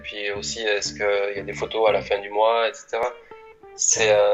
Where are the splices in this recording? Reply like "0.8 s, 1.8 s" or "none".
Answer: none